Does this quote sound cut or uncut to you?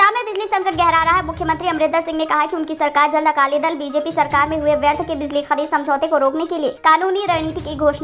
uncut